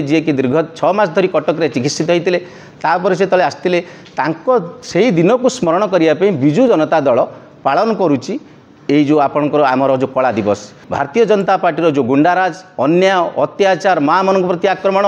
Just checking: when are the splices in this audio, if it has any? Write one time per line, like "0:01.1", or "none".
0:10.8